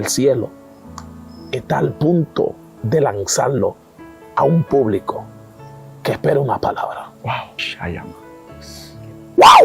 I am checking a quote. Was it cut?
yes; 1 cut; at 7.7 s

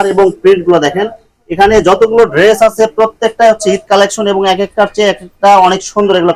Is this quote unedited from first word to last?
yes; 0 cuts

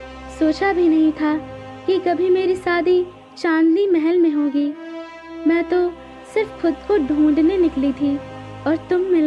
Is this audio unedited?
yes; 0 cuts

